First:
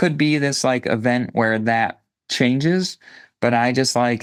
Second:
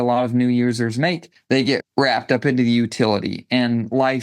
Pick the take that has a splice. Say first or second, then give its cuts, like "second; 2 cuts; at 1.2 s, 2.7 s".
second; 1 cut; at 1.6 s